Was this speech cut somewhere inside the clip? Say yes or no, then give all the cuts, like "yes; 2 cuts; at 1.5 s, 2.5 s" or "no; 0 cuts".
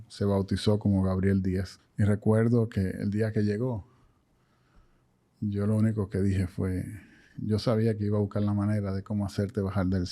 yes; 1 cut; at 1.8 s